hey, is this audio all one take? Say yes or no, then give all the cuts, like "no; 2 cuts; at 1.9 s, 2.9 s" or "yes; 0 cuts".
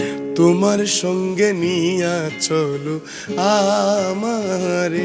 yes; 0 cuts